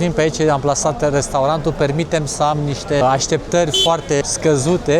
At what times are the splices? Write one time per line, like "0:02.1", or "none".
0:03.0
0:04.2